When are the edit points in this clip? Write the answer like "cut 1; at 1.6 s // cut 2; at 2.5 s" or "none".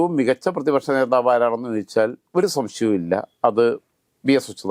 none